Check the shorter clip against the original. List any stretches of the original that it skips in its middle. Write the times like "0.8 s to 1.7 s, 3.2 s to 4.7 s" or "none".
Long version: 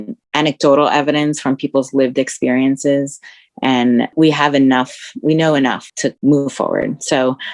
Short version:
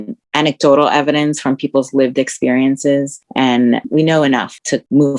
3.5 s to 4.9 s